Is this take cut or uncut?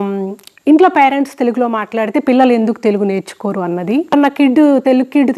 cut